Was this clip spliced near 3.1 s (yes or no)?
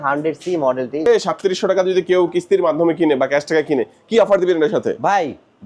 no